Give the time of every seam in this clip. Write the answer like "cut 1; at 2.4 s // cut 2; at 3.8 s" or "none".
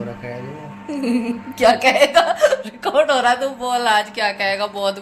none